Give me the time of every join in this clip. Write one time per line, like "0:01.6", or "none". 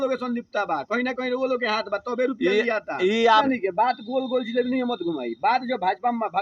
0:03.4